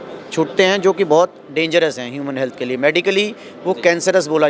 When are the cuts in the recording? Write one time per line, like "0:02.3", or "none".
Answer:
none